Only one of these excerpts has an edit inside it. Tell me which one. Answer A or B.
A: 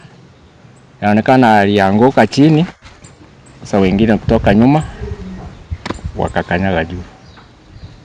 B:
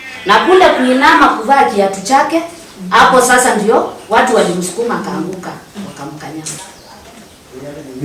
B